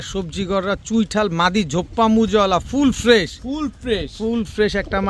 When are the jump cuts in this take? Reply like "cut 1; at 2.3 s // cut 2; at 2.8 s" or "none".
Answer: none